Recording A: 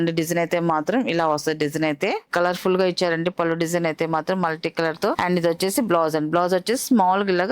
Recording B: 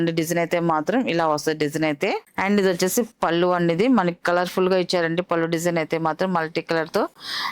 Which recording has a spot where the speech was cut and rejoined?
A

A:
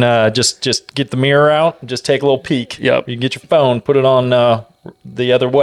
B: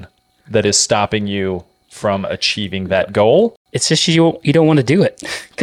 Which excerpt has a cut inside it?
B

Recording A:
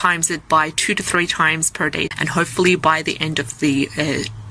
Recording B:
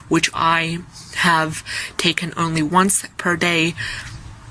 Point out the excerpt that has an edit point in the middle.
A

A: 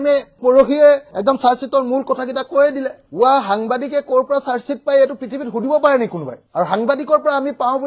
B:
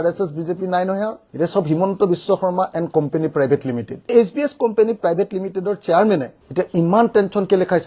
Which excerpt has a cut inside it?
B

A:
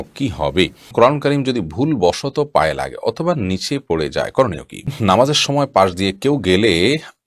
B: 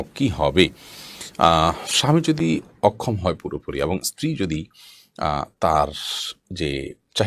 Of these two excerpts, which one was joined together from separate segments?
A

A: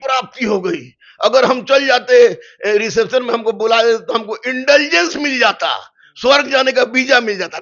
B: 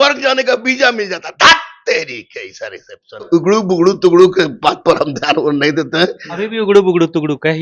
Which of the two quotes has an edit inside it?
B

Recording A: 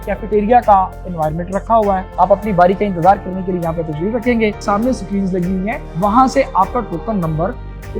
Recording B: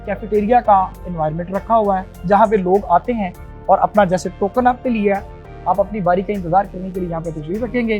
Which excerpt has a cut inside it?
A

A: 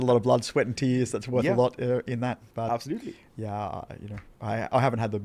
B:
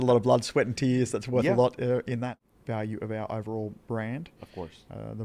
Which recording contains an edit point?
B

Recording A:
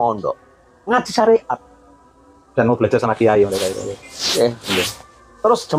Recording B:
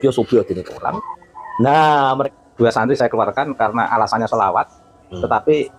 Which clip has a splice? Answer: B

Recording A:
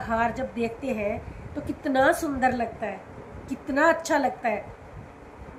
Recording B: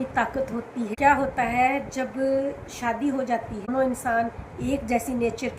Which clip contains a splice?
B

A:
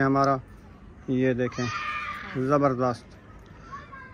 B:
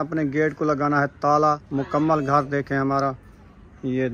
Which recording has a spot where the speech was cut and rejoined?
B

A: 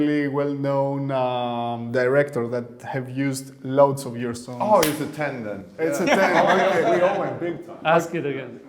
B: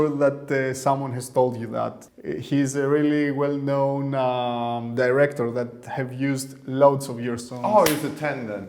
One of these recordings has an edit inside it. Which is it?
B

